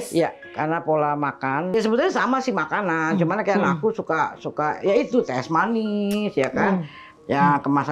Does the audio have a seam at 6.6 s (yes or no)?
no